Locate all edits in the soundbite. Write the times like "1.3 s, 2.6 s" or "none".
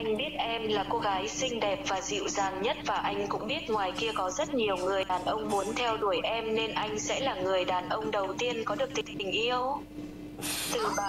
5.1 s, 9.1 s